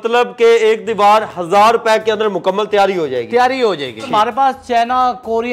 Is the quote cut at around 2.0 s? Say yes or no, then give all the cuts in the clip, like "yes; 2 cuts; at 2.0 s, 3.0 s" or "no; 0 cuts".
no; 1 cut; at 4.1 s